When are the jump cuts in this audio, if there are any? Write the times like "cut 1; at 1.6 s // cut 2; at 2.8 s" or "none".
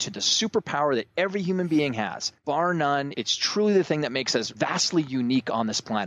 cut 1; at 2.3 s // cut 2; at 3.1 s // cut 3; at 4.5 s